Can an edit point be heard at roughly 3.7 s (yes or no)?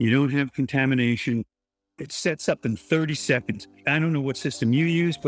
yes